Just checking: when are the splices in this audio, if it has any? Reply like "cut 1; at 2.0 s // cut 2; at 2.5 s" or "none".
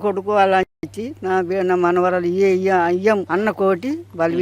cut 1; at 3.2 s

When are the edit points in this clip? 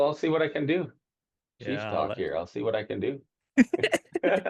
none

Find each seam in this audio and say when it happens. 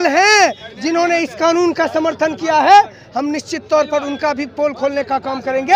none

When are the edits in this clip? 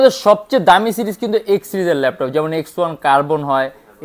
none

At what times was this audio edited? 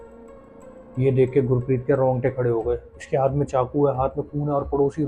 cut 1; at 3.0 s

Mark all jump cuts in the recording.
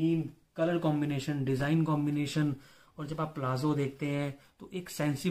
none

